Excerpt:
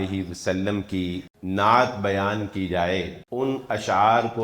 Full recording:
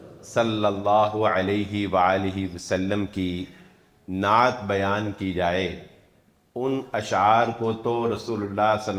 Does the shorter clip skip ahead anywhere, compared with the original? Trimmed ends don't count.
yes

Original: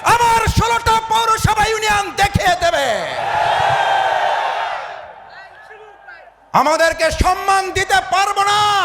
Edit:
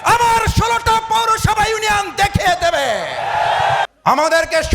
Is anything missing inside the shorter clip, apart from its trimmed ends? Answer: yes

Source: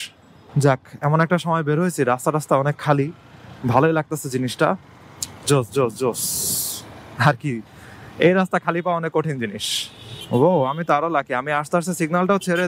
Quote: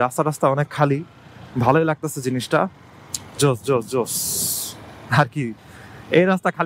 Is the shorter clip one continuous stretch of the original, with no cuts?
yes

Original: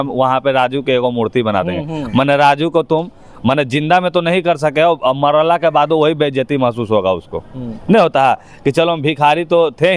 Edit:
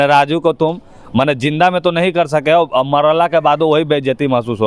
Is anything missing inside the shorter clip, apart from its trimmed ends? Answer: no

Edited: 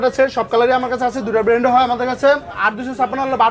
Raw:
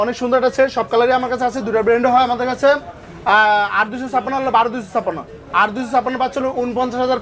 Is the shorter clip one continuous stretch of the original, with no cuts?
no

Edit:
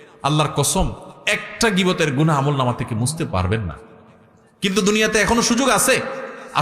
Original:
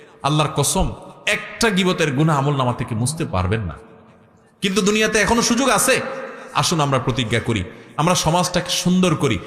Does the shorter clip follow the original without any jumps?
yes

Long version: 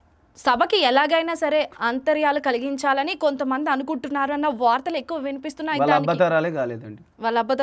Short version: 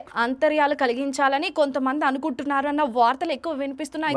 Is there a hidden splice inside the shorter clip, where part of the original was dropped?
no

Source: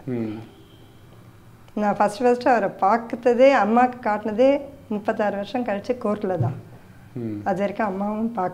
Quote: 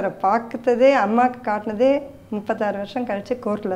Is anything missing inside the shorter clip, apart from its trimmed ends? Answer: no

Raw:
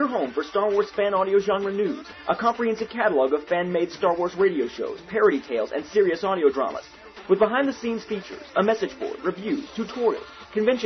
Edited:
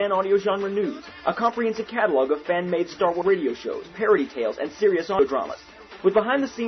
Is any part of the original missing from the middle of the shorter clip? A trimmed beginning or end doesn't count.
yes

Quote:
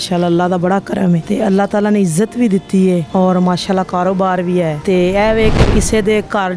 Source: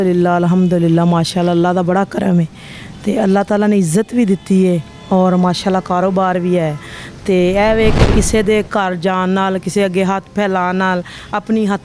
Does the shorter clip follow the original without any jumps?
no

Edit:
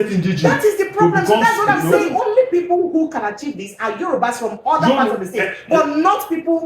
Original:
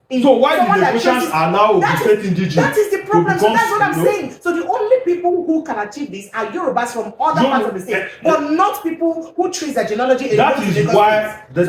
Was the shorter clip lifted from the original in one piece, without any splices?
no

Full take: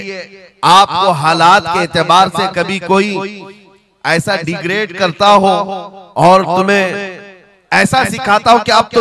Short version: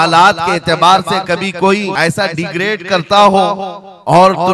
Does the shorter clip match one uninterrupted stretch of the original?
no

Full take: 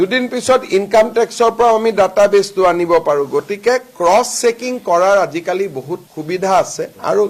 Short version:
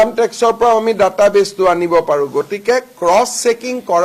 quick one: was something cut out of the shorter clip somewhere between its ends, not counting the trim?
no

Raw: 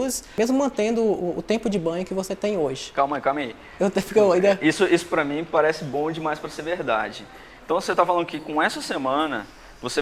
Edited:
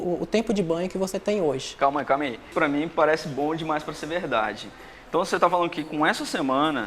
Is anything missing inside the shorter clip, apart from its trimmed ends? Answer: yes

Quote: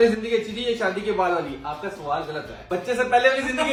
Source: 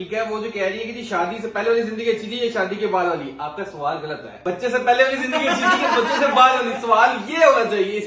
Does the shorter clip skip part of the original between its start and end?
no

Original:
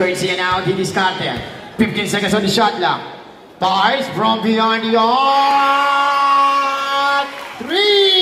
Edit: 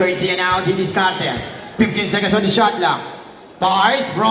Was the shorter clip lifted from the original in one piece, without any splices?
yes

